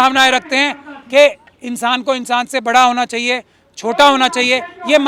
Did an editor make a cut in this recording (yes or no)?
no